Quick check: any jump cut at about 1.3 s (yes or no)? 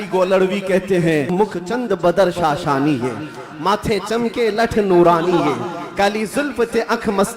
yes